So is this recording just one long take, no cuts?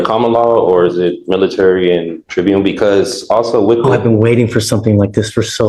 no; 1 cut; at 2.2 s

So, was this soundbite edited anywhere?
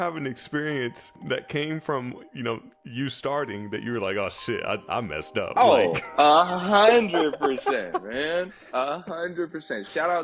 yes; 1 cut; at 1.1 s

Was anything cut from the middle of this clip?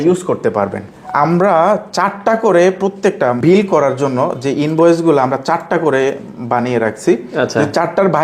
yes; 2 cuts; at 0.9 s, 3.4 s

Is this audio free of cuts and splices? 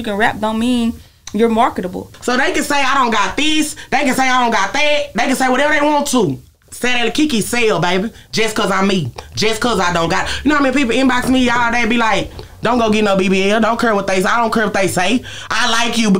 no; 1 cut; at 2.0 s

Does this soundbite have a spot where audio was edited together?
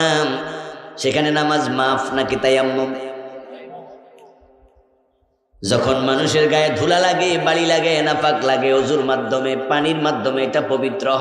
no; 0 cuts

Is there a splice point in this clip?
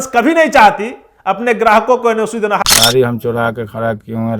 yes; 1 cut; at 2.6 s

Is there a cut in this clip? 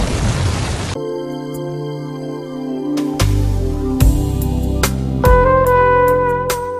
yes; 1 cut; at 0.9 s

